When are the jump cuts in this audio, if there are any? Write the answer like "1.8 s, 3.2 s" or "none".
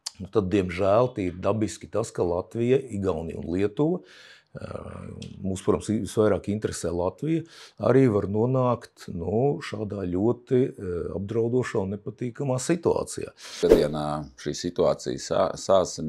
13.6 s